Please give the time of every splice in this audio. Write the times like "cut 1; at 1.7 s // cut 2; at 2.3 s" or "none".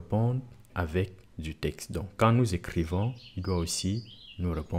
none